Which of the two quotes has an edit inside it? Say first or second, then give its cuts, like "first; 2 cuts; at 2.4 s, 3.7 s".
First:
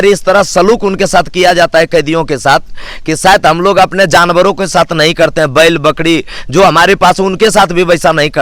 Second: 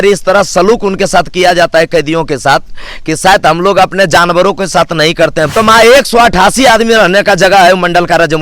second; 1 cut; at 5.5 s